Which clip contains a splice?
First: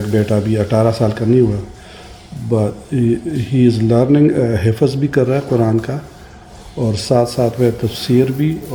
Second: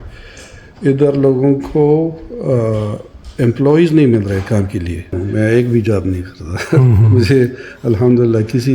second; 1 cut; at 5.2 s

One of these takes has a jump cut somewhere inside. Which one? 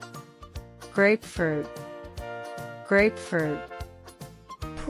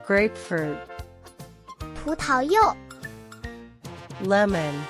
second; 1 cut; at 4.0 s

